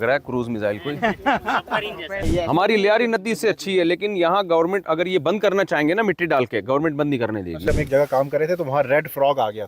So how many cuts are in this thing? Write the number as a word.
two